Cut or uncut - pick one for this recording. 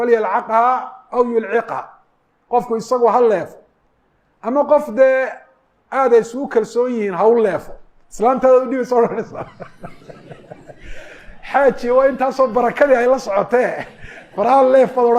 uncut